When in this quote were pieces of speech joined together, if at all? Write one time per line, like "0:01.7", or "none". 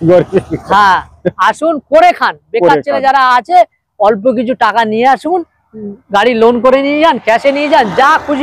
none

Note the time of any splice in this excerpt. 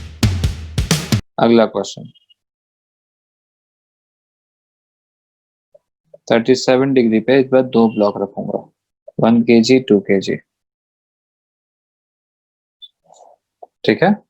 none

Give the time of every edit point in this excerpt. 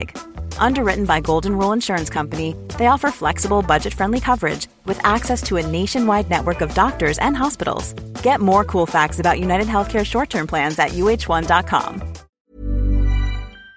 0:12.2

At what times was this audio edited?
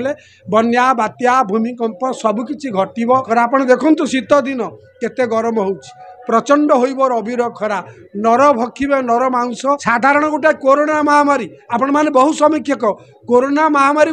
0:03.3
0:09.8

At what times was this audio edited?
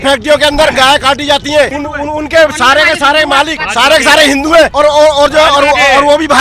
0:01.8
0:03.6
0:04.7

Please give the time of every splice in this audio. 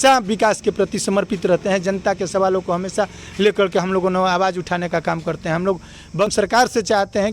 0:06.3

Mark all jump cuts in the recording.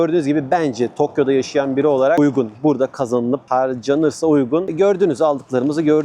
0:02.2

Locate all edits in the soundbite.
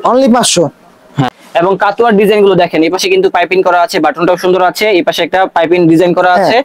0:01.4

